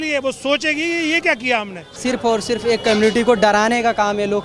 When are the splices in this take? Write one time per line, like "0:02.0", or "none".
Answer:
0:02.0